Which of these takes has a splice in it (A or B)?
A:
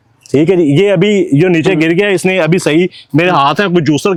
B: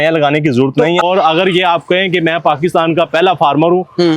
B